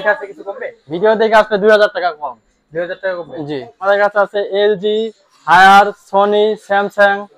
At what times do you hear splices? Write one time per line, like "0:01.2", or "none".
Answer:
0:03.8